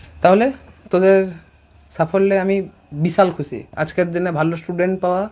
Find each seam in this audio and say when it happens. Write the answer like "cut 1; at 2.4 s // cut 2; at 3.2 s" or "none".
cut 1; at 3.6 s